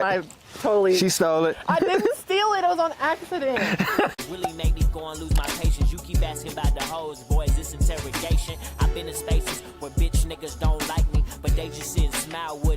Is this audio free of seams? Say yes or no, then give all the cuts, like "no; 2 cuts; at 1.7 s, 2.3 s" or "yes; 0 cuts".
no; 1 cut; at 4.2 s